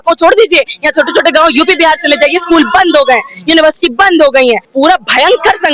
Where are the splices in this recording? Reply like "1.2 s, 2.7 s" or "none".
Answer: 4.7 s